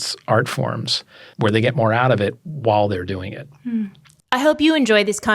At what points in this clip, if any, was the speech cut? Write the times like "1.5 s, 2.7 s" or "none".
1.2 s, 4.1 s